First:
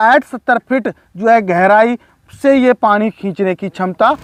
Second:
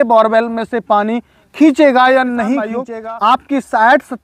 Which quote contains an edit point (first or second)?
second